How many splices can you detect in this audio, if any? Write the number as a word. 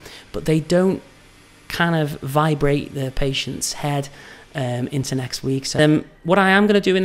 one